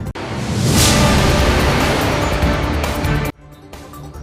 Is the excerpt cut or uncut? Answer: cut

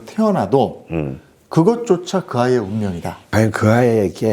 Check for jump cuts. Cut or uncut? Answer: cut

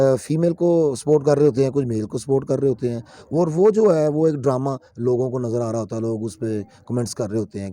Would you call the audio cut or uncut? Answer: uncut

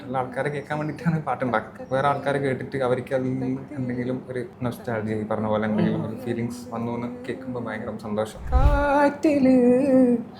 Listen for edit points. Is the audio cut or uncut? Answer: cut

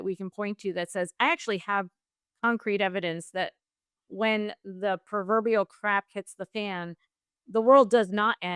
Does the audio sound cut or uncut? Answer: uncut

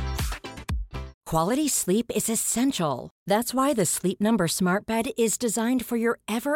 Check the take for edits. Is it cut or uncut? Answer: cut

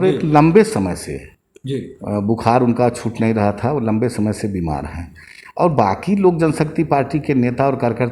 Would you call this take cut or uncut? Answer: uncut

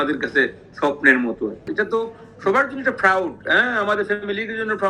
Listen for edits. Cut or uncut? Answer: cut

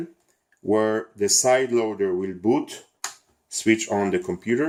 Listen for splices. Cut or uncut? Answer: uncut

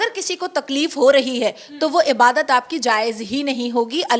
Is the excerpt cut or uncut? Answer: uncut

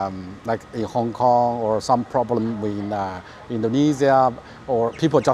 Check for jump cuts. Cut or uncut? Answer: uncut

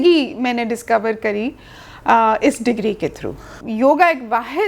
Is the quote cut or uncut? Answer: cut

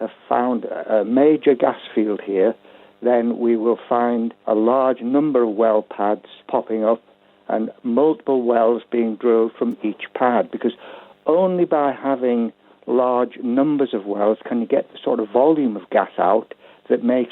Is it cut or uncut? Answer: cut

